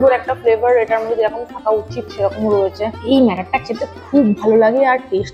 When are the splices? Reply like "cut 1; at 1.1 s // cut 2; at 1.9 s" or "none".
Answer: cut 1; at 2.9 s